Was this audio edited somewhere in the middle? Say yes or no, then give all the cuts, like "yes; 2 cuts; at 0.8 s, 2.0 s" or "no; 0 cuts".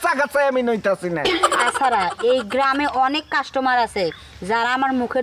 yes; 1 cut; at 1.6 s